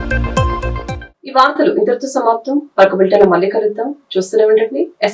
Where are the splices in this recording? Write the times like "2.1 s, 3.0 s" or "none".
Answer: none